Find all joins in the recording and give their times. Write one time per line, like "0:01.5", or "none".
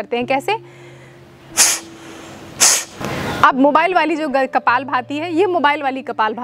0:03.0